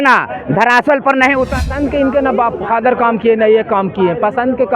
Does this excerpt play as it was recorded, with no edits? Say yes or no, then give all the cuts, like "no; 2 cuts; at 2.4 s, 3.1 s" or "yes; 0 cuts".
no; 1 cut; at 1.6 s